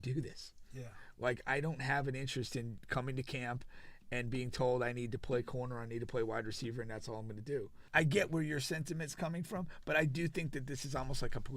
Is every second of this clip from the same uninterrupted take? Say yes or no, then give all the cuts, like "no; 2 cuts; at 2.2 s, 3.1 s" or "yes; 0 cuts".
no; 1 cut; at 7.8 s